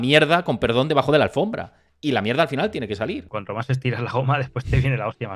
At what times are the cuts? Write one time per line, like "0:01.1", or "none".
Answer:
0:03.3